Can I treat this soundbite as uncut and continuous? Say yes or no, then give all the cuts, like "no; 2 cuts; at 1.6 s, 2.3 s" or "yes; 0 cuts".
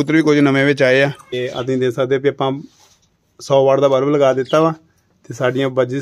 no; 1 cut; at 1.4 s